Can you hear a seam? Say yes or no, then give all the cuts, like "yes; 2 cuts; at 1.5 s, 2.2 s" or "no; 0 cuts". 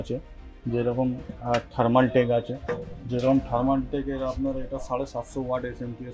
no; 0 cuts